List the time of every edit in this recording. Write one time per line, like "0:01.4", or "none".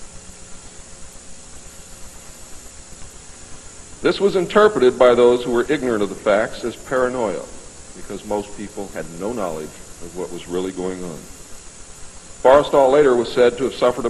none